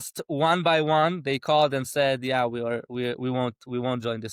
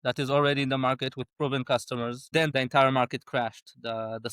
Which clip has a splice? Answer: second; 1 cut; at 2.5 s

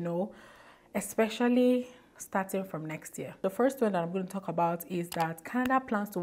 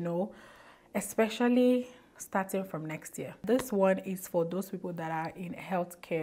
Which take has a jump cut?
second; 1 cut; at 3.4 s

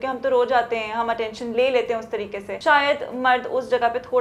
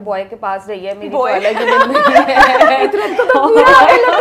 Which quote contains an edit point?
first; 1 cut; at 2.4 s

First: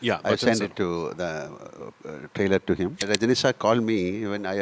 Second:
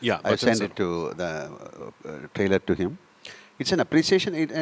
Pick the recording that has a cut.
first; 1 cut; at 3.0 s

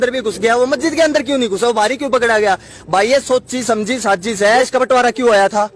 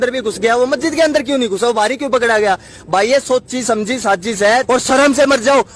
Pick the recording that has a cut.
first; 1 cut; at 4.6 s

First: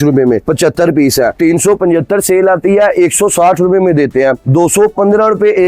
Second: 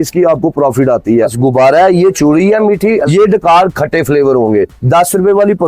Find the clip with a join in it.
second; 2 cuts; at 1.3 s, 3.0 s

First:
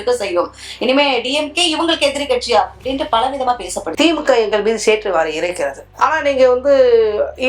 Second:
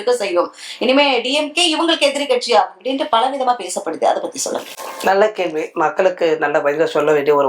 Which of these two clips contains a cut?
first; 2 cuts; at 3.9 s, 5.8 s

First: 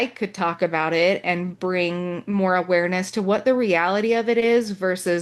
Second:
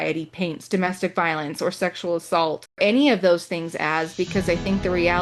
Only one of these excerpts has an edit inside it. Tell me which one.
second; 1 cut; at 2.8 s

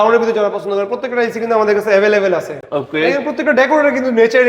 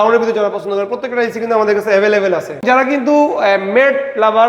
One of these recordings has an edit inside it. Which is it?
second; 1 cut; at 2.6 s

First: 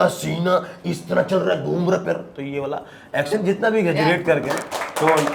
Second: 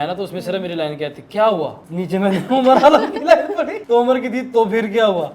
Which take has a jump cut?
second; 2 cuts; at 1.8 s, 3.8 s

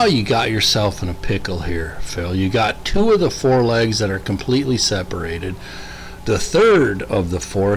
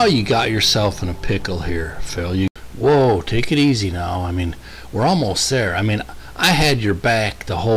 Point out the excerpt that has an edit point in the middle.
second; 1 cut; at 2.5 s

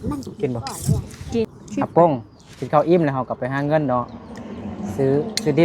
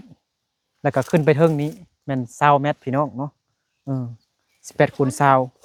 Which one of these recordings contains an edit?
first; 1 cut; at 1.4 s

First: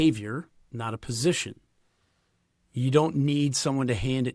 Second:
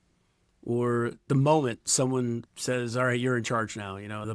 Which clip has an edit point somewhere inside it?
second; 1 cut; at 2.5 s

